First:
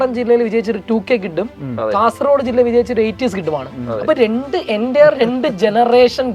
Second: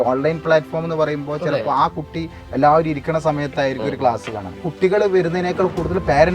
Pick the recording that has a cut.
second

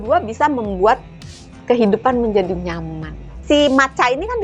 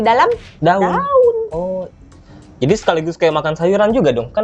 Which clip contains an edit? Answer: first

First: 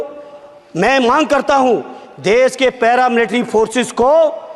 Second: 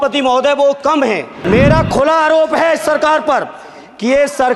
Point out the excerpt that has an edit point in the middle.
second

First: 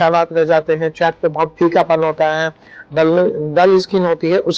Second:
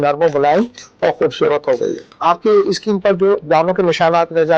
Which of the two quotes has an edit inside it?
second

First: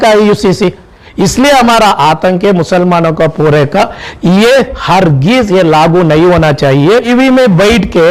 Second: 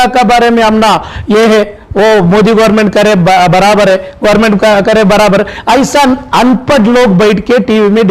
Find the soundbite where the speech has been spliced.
first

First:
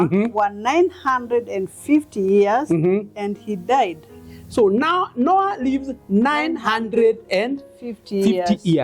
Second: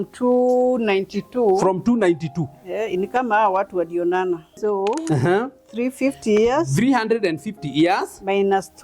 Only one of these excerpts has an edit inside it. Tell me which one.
second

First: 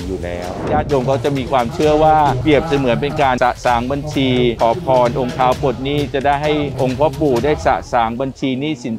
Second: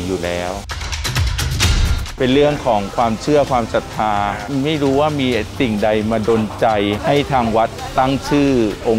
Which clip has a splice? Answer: first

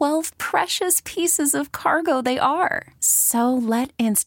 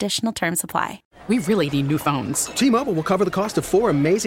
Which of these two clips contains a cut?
second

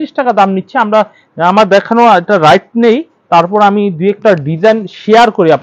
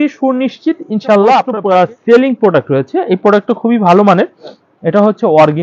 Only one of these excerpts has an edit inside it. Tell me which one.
second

